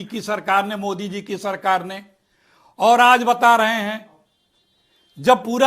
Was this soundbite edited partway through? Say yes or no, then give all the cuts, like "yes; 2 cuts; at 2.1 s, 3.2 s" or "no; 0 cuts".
yes; 1 cut; at 2.6 s